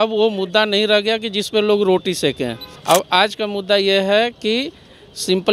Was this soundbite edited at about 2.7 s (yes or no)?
yes